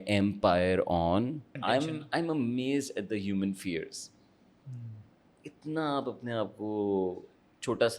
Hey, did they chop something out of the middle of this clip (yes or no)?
yes